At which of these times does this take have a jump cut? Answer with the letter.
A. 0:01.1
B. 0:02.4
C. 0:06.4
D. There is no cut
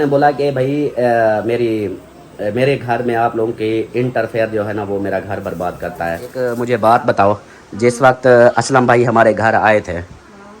C